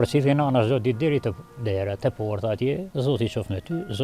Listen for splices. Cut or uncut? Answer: cut